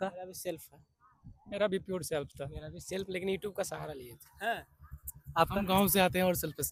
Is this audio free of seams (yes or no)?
yes